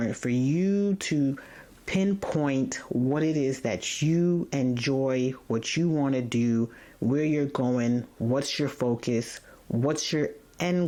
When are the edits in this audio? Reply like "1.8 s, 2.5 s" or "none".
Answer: none